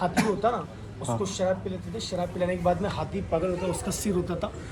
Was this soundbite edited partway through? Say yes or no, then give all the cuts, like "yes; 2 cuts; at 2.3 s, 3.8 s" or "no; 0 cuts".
no; 0 cuts